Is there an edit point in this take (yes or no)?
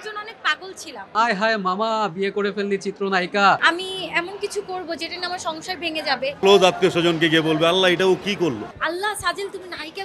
yes